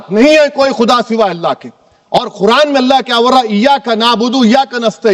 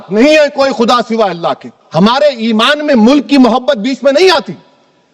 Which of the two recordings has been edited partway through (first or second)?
second